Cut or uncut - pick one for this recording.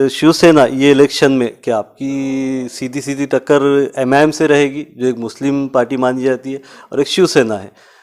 uncut